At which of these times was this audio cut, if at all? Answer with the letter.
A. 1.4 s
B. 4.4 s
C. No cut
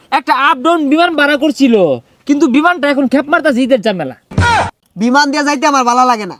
B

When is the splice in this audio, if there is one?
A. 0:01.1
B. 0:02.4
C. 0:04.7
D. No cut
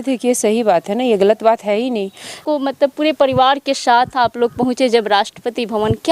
B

